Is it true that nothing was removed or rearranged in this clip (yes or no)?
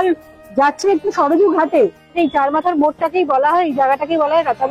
no